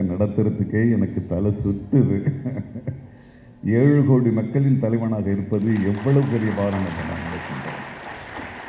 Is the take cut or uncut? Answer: uncut